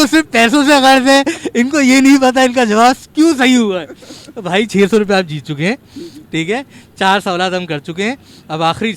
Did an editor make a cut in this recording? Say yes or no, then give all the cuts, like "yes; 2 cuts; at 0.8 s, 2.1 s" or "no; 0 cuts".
no; 0 cuts